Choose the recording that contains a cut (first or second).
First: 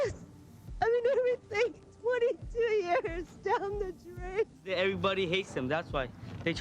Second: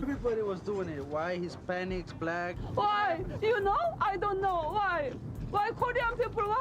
first